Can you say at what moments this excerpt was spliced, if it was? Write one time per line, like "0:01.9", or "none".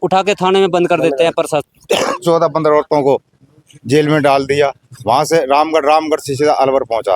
0:01.7